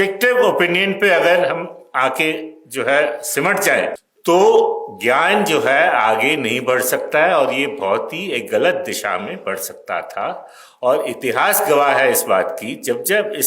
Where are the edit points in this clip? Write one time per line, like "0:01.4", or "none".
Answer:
0:04.1